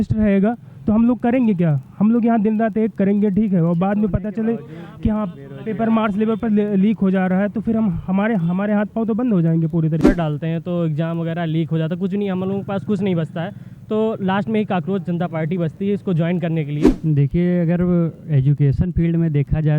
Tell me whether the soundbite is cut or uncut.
cut